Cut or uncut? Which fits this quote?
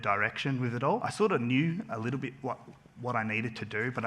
cut